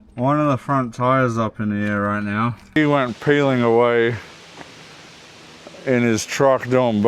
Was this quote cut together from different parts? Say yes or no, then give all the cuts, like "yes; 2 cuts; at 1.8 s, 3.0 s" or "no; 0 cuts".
yes; 1 cut; at 2.8 s